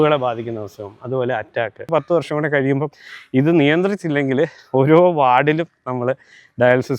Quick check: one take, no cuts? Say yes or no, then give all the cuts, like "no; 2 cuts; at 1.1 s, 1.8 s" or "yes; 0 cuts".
no; 1 cut; at 1.9 s